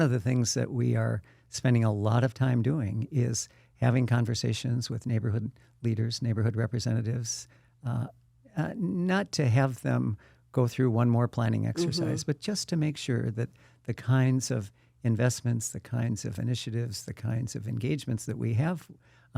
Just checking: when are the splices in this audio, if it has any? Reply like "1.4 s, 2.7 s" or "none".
none